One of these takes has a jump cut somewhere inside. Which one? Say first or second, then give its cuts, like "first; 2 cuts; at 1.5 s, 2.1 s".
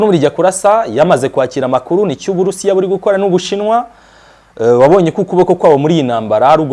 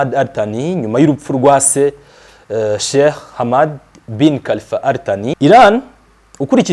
second; 1 cut; at 5.4 s